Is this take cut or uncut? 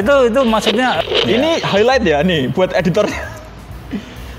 cut